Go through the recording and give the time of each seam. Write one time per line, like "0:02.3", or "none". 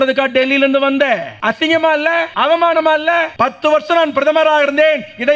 0:01.3
0:02.3
0:03.3